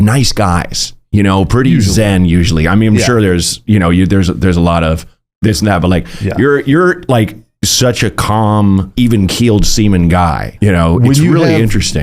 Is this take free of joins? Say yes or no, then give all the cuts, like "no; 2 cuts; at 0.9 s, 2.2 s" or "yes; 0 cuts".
no; 2 cuts; at 8.9 s, 10.5 s